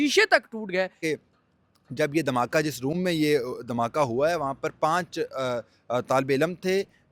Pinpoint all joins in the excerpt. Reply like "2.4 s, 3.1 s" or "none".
1.0 s